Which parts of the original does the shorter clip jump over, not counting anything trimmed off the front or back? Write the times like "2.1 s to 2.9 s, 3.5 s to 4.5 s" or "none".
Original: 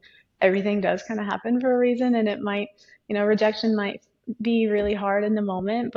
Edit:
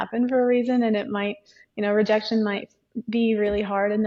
none